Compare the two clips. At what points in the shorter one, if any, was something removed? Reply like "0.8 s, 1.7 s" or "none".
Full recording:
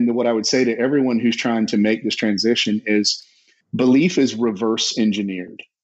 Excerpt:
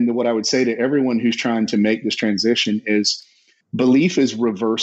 none